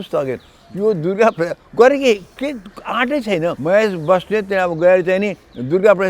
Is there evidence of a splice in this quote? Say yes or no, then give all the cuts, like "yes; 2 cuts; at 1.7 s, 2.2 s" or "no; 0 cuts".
yes; 1 cut; at 3.6 s